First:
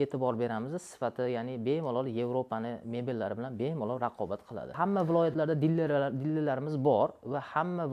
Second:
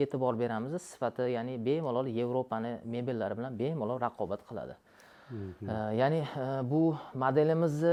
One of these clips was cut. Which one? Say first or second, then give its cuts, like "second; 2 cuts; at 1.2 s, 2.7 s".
first; 1 cut; at 4.7 s